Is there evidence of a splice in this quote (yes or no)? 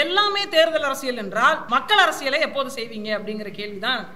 yes